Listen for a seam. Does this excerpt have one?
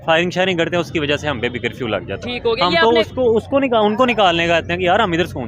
no; 0 cuts

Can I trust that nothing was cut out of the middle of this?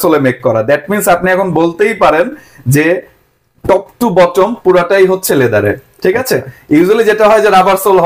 yes; 0 cuts

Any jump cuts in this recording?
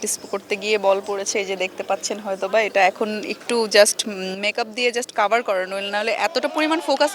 no; 0 cuts

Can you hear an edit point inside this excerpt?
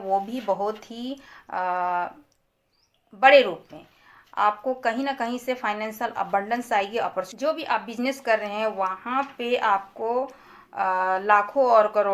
yes; 1 cut; at 7.3 s

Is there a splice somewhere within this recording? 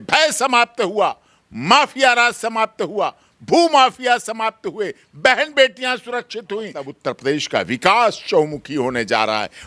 yes; 1 cut; at 6.9 s

